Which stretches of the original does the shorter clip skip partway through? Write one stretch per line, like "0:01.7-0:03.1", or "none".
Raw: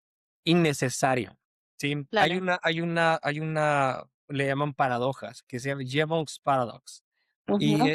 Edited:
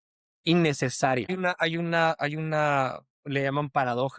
0:01.3-0:02.4